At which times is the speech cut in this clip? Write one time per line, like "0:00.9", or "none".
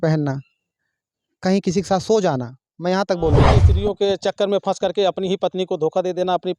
0:03.7